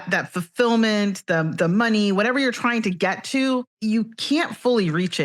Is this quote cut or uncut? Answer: cut